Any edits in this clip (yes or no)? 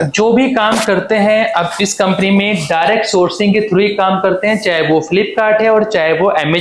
no